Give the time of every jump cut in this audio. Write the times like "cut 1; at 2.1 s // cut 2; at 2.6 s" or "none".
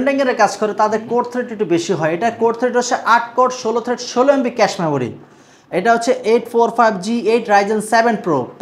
none